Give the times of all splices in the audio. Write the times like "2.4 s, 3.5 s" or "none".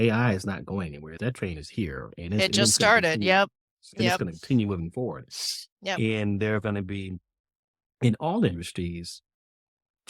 1.0 s